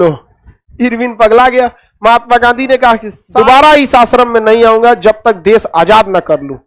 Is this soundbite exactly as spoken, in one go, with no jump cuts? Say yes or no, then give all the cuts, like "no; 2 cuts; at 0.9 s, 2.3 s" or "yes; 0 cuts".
no; 1 cut; at 3.2 s